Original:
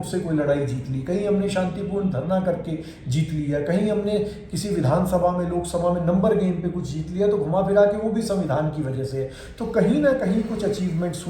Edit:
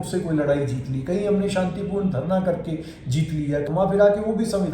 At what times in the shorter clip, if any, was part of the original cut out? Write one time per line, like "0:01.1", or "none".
0:03.7